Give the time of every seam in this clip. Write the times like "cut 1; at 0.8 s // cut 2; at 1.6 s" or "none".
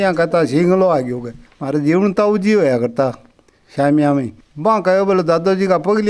cut 1; at 4.4 s